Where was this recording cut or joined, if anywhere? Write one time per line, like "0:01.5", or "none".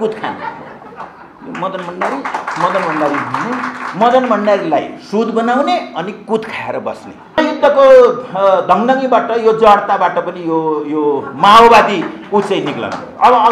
0:07.3